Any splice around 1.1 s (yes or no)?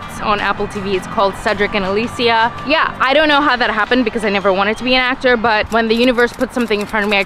no